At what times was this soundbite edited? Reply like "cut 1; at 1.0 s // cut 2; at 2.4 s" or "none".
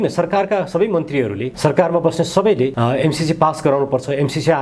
cut 1; at 1.5 s // cut 2; at 2.7 s